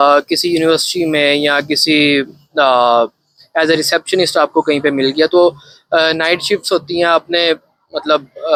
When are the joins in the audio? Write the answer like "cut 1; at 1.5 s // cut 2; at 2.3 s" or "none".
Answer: none